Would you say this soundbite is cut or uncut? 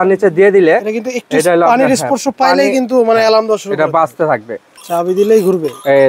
cut